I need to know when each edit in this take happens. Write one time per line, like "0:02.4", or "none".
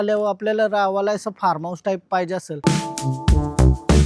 0:02.6